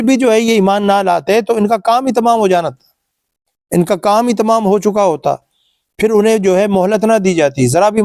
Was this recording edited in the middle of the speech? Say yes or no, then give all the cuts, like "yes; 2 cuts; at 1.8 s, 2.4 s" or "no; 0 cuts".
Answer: no; 0 cuts